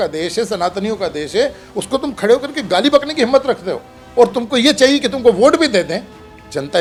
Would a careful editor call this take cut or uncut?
uncut